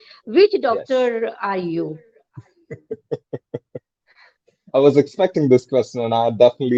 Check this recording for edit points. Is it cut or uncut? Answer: uncut